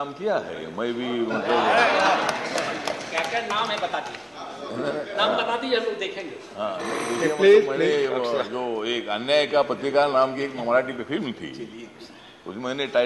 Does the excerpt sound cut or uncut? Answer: uncut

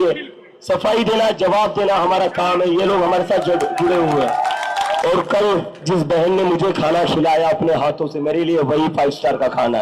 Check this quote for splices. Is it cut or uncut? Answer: cut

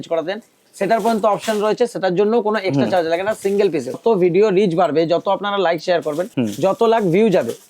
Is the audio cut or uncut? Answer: cut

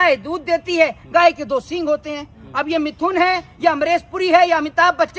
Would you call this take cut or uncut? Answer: uncut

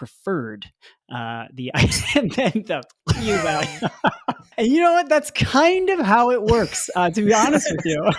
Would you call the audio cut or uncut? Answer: cut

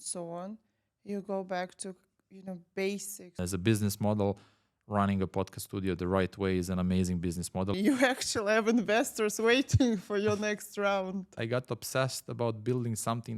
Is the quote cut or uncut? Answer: cut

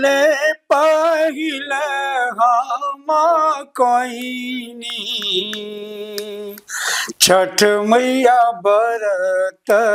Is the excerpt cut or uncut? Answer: uncut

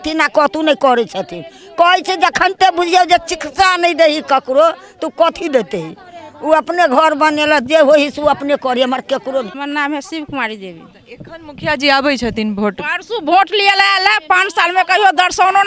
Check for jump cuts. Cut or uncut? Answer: cut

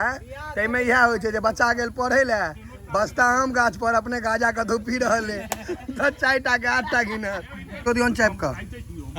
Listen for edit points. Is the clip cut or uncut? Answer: cut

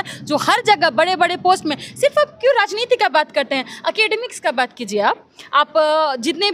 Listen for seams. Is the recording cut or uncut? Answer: uncut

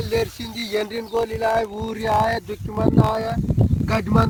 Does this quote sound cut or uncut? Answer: uncut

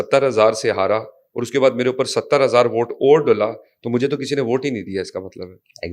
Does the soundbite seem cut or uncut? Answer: uncut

